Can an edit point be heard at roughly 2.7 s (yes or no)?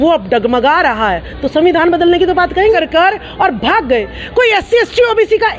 yes